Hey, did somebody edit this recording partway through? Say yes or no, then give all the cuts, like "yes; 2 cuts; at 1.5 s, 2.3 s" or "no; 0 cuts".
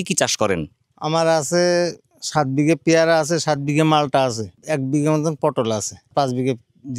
yes; 2 cuts; at 4.5 s, 6.1 s